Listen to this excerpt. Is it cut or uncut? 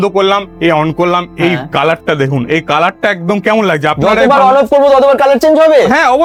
uncut